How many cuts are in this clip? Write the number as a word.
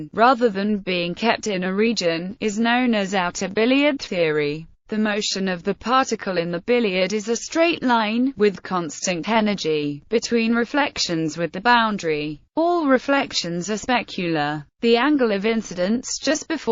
one